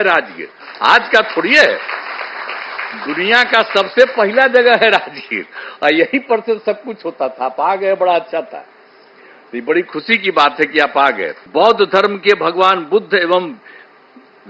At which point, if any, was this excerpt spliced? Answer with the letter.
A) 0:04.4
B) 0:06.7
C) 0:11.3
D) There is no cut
C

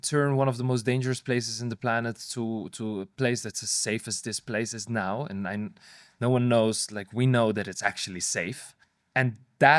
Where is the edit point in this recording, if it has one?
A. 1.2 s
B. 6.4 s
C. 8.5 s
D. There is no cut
C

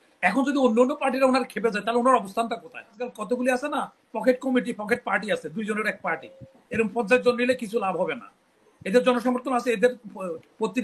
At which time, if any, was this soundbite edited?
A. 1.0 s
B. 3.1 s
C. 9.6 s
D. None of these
B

